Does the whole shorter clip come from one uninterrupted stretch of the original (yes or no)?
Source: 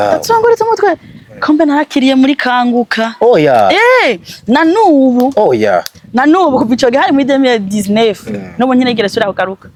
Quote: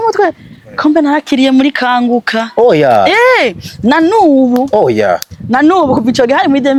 yes